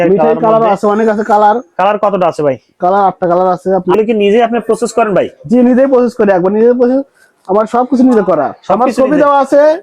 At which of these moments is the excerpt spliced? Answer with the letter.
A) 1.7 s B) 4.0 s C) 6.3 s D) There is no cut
B